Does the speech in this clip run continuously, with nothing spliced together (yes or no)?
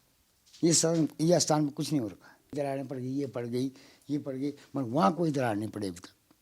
no